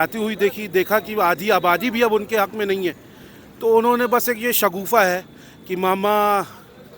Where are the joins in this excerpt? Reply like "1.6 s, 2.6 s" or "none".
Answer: none